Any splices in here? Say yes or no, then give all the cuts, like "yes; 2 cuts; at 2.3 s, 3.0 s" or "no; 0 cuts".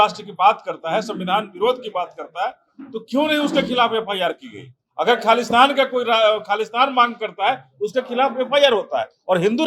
no; 0 cuts